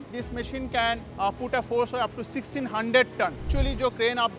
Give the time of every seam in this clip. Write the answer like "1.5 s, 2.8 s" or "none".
3.5 s